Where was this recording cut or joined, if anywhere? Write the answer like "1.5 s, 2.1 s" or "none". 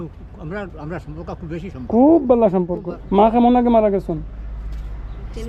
2.8 s